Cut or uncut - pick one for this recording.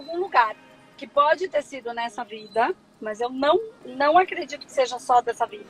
uncut